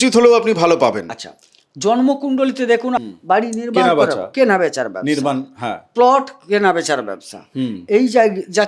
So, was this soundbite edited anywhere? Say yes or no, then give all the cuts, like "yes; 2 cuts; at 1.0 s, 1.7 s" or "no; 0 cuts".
yes; 1 cut; at 3.0 s